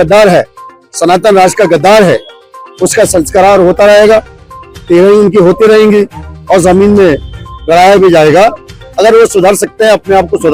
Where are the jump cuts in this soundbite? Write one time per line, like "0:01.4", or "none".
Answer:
none